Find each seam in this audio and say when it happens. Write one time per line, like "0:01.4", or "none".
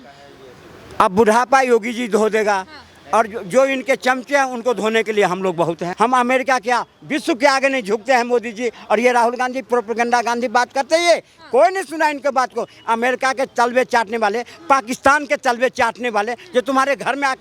0:05.9

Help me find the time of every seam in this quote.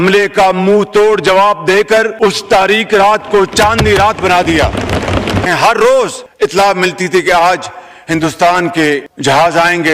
0:05.5

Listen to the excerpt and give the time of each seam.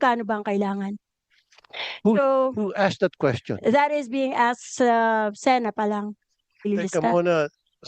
0:06.7

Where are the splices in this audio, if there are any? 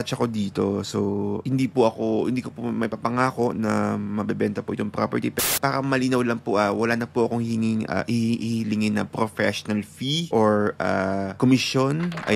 0:05.4
0:10.2
0:11.3

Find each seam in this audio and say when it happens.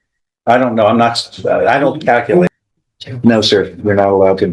0:02.5

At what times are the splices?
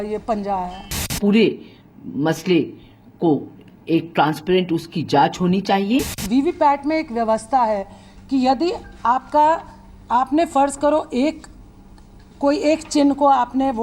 0:06.2

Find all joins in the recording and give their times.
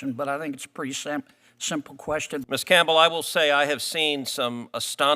0:02.4

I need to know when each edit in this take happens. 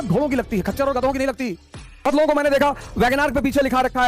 0:02.1

